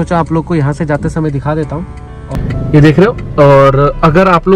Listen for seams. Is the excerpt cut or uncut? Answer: cut